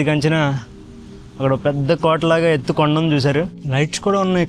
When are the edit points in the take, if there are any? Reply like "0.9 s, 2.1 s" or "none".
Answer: 3.6 s